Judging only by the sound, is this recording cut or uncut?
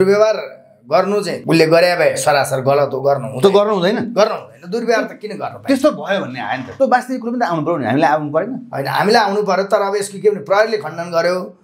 cut